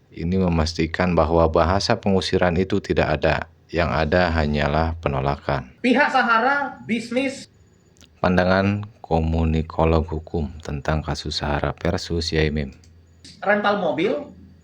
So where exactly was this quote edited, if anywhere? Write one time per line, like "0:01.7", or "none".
0:05.7